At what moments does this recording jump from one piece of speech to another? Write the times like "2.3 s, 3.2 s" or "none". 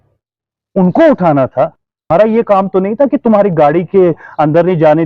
1.9 s